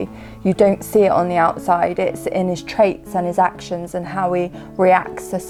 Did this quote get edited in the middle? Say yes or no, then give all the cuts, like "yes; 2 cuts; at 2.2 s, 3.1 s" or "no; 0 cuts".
no; 0 cuts